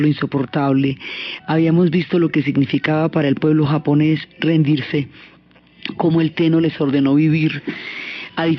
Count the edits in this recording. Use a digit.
1